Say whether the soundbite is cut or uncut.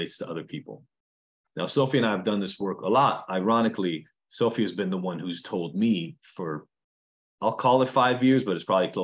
uncut